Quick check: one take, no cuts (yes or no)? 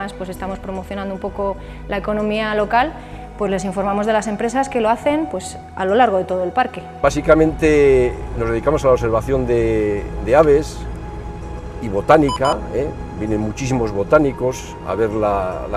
no